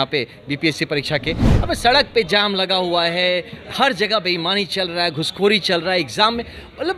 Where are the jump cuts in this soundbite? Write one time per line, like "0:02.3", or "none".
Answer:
0:01.5